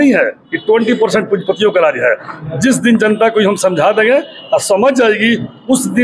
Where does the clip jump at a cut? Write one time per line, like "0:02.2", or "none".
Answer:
none